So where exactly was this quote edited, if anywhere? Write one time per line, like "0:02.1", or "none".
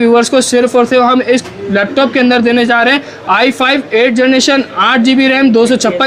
none